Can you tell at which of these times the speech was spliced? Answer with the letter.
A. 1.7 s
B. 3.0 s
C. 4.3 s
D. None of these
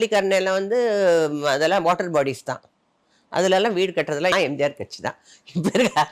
C